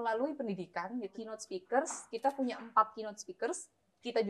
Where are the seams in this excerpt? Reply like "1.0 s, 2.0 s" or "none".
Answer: 1.1 s